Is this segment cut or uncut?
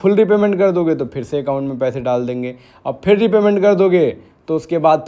uncut